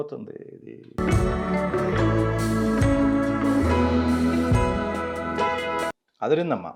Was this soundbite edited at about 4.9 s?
no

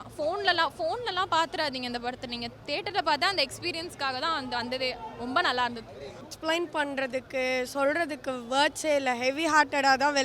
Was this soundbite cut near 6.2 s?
yes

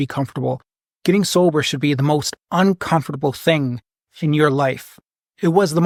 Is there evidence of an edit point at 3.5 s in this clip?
no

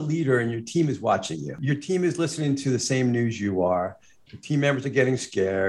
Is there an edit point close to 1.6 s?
yes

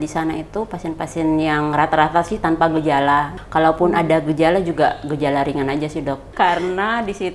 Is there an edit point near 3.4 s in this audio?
yes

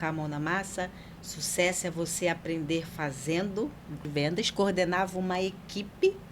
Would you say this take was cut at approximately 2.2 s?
no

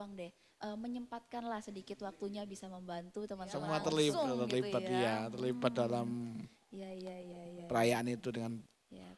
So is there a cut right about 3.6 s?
yes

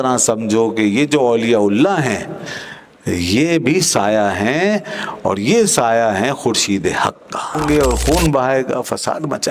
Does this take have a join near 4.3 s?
no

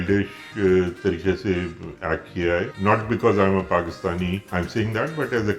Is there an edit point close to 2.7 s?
yes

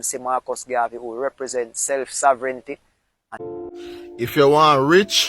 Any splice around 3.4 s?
yes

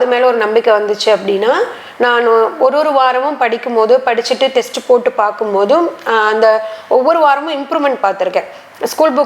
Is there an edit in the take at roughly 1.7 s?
no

